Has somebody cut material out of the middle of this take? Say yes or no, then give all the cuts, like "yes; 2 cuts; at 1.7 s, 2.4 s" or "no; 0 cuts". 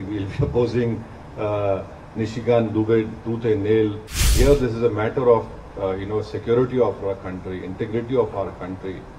yes; 1 cut; at 4.3 s